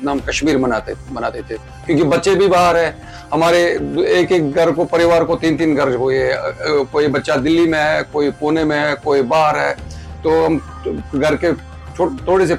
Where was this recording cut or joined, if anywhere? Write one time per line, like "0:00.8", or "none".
none